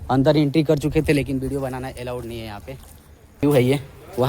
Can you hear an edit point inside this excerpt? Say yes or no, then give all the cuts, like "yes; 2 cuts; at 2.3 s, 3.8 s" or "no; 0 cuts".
yes; 1 cut; at 3.4 s